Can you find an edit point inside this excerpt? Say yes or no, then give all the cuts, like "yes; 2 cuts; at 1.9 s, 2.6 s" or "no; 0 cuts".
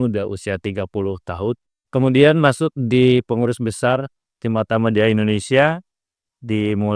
yes; 1 cut; at 1.7 s